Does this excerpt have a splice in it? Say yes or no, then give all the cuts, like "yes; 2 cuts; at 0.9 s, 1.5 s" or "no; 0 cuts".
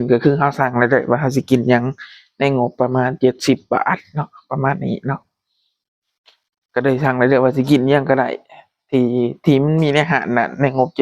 no; 0 cuts